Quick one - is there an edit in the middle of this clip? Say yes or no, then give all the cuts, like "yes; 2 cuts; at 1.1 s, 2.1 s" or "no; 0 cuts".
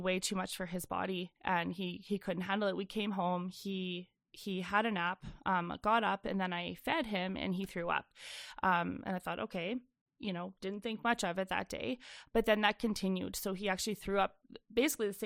no; 0 cuts